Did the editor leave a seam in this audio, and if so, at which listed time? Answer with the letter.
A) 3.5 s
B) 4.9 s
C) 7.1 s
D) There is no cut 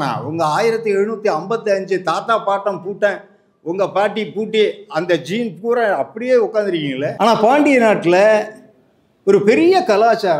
C